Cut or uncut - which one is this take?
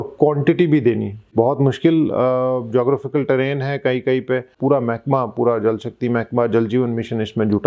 cut